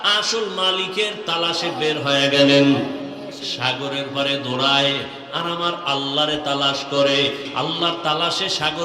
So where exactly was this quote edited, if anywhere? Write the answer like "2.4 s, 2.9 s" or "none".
7.5 s